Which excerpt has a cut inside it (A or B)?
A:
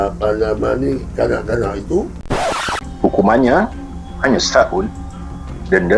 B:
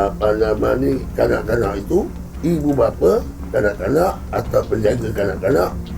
A